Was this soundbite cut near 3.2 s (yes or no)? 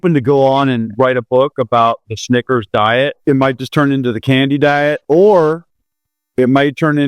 yes